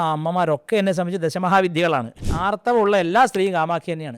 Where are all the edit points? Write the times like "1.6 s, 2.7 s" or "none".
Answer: 2.2 s